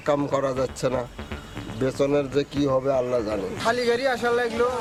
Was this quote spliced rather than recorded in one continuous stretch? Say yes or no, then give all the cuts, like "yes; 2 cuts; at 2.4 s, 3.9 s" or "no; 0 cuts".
no; 0 cuts